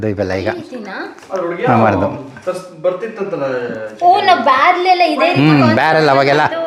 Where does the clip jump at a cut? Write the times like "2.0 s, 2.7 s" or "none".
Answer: none